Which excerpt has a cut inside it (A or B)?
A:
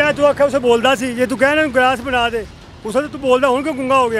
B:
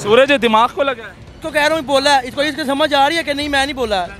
B